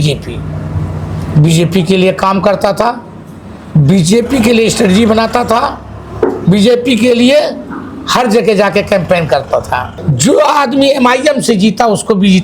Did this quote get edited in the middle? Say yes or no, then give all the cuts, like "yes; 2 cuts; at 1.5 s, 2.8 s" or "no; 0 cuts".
yes; 1 cut; at 10.0 s